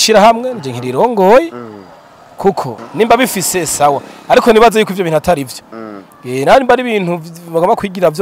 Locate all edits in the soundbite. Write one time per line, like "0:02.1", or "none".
0:02.8